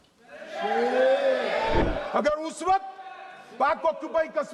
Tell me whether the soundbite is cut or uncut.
cut